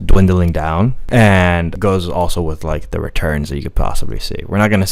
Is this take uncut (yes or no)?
no